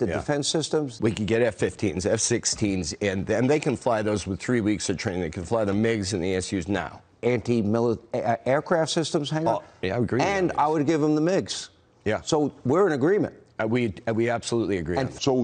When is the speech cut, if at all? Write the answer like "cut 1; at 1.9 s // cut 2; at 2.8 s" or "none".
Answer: cut 1; at 0.9 s // cut 2; at 7.1 s